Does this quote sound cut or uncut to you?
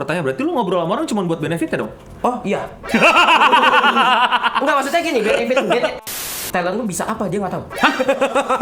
cut